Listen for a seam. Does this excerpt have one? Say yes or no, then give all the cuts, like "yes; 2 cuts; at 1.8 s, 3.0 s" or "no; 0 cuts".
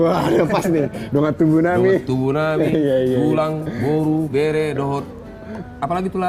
no; 0 cuts